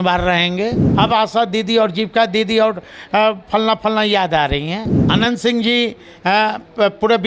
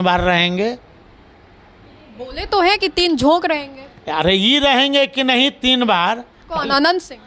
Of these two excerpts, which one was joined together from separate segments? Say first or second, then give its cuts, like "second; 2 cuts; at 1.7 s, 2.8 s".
first; 2 cuts; at 0.8 s, 4.9 s